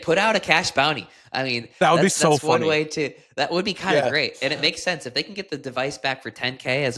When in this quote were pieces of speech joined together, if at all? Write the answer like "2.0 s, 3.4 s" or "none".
none